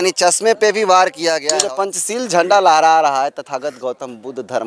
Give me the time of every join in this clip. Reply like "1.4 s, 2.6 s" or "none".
1.5 s